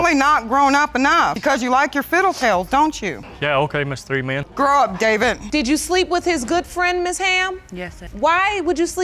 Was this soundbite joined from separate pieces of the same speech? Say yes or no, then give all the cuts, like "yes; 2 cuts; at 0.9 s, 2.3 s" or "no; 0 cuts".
yes; 1 cut; at 5.4 s